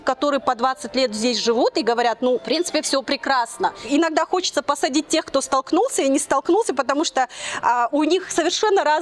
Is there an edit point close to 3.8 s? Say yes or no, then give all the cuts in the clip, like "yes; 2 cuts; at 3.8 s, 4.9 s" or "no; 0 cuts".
yes; 2 cuts; at 2.4 s, 3.8 s